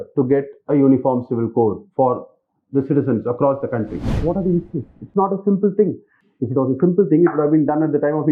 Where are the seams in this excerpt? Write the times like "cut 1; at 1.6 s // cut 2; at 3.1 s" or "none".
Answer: cut 1; at 4.2 s